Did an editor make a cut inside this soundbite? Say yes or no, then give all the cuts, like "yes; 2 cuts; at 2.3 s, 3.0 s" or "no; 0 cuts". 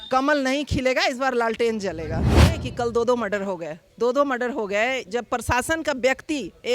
yes; 1 cut; at 2.5 s